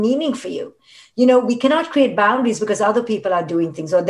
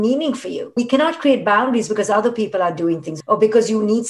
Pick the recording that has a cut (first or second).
second